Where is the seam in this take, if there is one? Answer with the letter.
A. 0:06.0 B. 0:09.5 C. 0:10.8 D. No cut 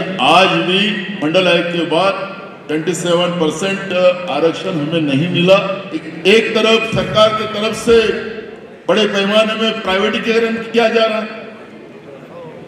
A